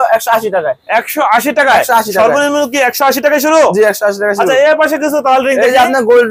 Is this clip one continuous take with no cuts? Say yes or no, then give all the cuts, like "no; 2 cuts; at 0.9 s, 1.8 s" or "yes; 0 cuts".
yes; 0 cuts